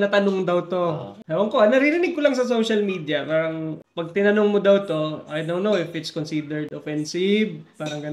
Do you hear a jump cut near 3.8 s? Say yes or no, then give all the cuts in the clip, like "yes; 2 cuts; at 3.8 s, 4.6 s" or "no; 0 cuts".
yes; 2 cuts; at 1.1 s, 3.8 s